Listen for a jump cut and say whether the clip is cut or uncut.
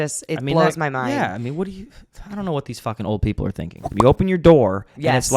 cut